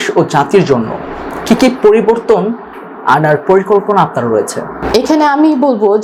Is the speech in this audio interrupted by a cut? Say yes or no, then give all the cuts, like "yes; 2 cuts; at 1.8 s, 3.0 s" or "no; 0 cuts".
no; 0 cuts